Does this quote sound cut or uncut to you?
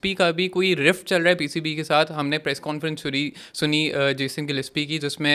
uncut